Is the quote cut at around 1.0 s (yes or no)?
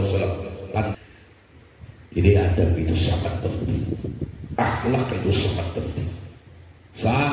yes